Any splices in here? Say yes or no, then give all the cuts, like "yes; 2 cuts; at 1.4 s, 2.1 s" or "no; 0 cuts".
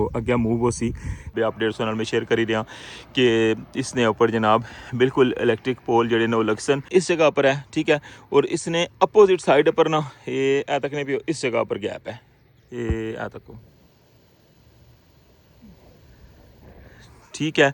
yes; 2 cuts; at 1.3 s, 6.9 s